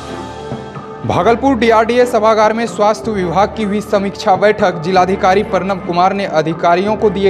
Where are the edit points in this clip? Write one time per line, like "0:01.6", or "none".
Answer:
none